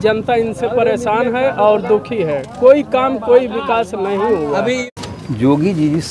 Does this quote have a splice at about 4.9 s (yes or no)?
yes